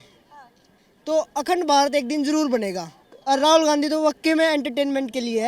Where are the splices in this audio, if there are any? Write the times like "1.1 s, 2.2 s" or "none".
2.9 s

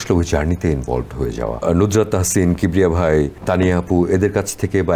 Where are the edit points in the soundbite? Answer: 1.6 s, 3.4 s

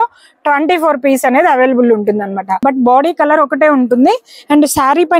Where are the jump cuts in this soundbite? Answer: 2.5 s

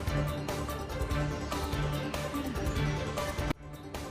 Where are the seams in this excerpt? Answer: 1.6 s

